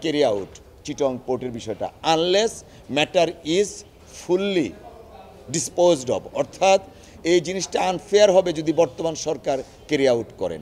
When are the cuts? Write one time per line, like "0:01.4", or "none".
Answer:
none